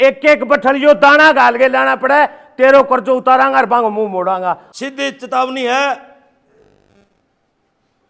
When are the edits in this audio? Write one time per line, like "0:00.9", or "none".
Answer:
0:04.7